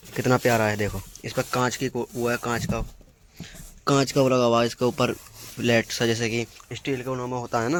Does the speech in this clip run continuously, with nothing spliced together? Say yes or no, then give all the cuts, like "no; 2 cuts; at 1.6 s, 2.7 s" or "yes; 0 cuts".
yes; 0 cuts